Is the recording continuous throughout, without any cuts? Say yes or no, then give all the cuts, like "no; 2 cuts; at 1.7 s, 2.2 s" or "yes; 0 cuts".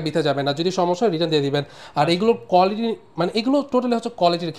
yes; 0 cuts